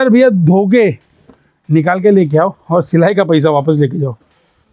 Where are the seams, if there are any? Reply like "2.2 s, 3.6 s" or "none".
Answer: none

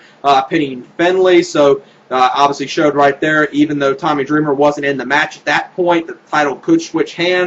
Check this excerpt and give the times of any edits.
none

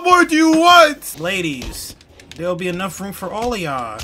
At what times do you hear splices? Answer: 1.1 s

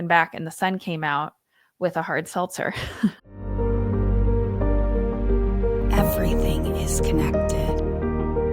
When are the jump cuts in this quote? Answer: 3.2 s

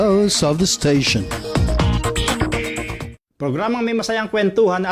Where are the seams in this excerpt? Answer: 3.4 s

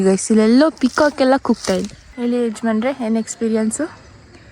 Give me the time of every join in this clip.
2.0 s

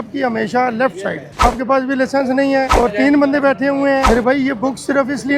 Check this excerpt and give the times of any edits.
1.4 s, 2.7 s, 4.1 s

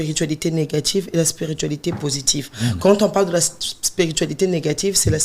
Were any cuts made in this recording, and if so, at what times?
none

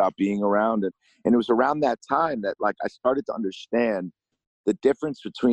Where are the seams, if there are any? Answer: 1.0 s

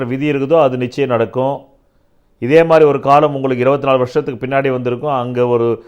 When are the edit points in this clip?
none

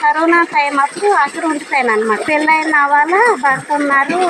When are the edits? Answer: 2.2 s

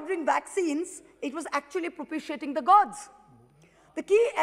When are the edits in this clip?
none

